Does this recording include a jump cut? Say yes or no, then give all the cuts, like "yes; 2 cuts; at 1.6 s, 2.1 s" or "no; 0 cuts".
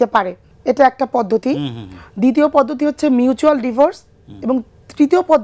no; 0 cuts